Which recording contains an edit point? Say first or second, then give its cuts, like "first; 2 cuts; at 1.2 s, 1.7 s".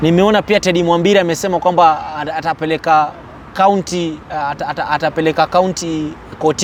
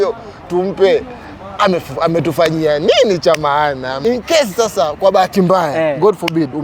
second; 1 cut; at 3.9 s